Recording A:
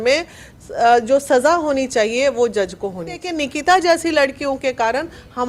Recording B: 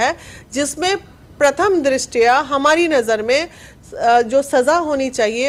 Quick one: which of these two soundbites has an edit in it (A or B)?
A